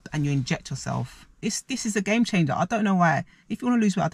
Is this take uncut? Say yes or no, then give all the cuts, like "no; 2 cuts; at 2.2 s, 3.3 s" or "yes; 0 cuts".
no; 1 cut; at 1.3 s